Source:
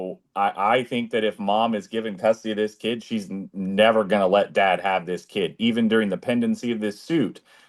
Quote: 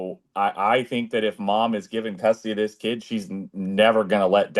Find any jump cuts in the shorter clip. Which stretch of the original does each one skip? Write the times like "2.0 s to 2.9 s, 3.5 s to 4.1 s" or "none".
none